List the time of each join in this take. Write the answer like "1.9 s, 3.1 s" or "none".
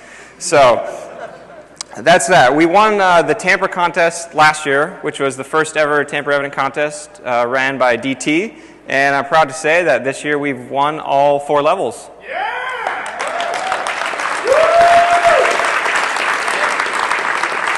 none